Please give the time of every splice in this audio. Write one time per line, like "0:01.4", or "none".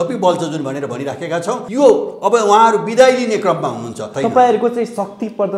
0:01.6
0:04.1